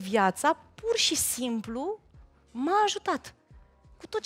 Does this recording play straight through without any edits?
yes; 0 cuts

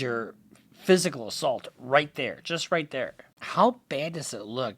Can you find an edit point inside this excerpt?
yes; 1 cut; at 3.2 s

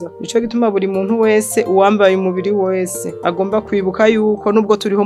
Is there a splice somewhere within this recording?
no; 0 cuts

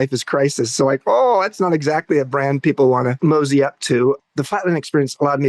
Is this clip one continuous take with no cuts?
no; 2 cuts; at 3.2 s, 4.2 s

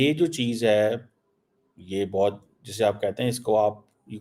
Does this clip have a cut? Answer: no; 0 cuts

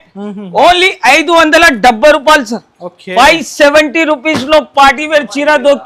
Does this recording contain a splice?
no; 0 cuts

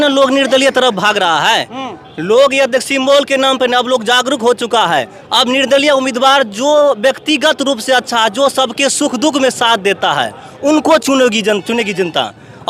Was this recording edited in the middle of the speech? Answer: no; 0 cuts

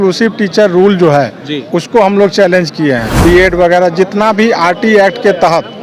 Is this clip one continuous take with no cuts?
no; 1 cut; at 3.1 s

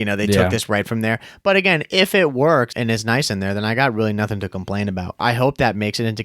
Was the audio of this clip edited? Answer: yes; 2 cuts; at 2.7 s, 5.2 s

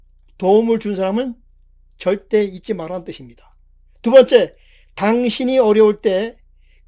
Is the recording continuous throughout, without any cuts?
yes; 0 cuts

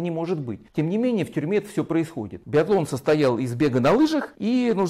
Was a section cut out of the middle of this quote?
yes; 1 cut; at 2.4 s

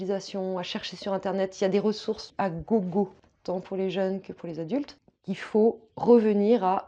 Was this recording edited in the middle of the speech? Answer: yes; 3 cuts; at 2.2 s, 3.3 s, 5.1 s

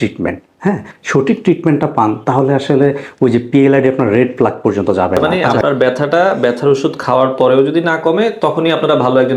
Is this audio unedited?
no; 1 cut; at 5.4 s

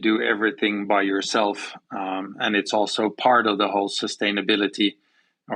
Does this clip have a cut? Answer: no; 0 cuts

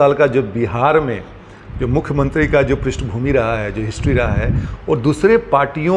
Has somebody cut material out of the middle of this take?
no; 0 cuts

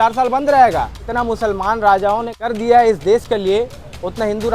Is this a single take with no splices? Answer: no; 2 cuts; at 1.1 s, 2.3 s

